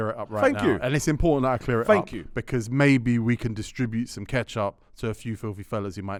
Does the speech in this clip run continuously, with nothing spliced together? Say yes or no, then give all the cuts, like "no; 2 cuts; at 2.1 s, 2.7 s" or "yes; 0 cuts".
yes; 0 cuts